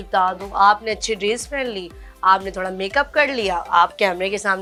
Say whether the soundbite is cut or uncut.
uncut